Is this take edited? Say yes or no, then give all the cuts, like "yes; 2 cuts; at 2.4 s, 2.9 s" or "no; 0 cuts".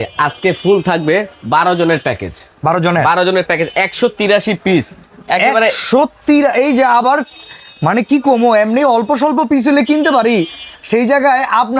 no; 0 cuts